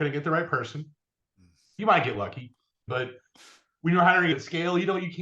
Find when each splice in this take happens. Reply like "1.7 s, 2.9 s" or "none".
1.8 s, 2.8 s, 4.3 s